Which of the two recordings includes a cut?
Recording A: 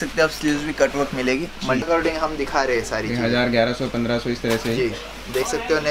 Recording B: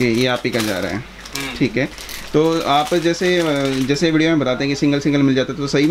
A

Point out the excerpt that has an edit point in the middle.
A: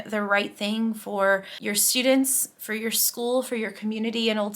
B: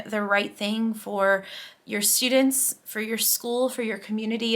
A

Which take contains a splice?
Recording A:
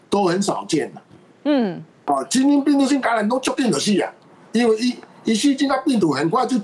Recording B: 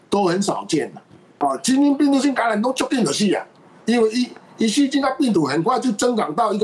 B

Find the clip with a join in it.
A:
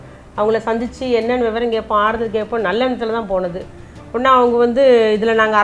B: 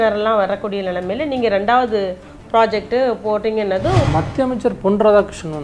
B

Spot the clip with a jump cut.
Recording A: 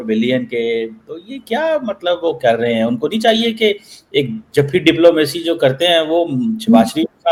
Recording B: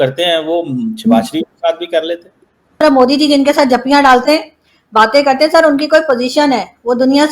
B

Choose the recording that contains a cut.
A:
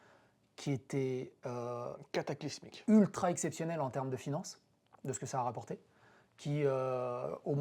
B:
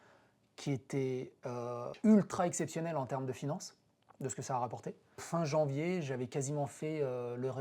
B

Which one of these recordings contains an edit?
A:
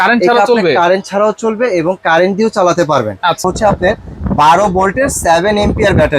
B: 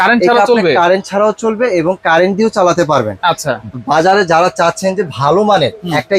A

